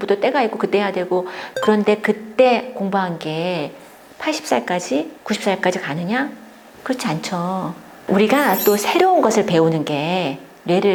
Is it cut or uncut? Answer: uncut